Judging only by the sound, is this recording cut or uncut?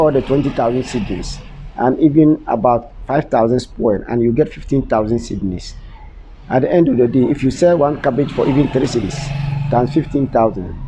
uncut